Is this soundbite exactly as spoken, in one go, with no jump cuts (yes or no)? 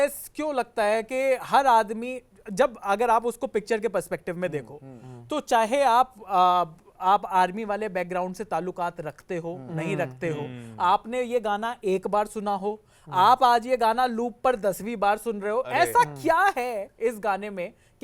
yes